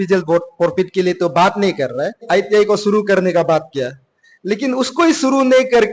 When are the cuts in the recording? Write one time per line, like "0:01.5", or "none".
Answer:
0:02.2